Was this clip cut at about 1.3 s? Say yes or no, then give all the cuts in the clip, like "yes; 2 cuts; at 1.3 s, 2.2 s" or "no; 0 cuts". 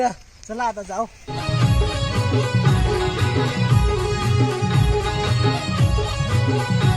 yes; 1 cut; at 1.3 s